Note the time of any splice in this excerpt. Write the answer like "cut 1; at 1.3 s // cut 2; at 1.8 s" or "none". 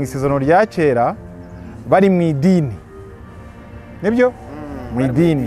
none